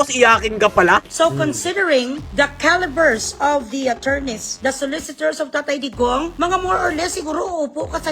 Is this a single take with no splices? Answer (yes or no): no